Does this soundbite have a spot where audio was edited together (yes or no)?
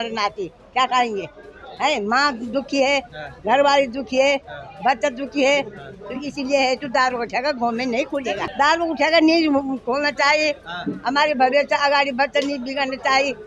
yes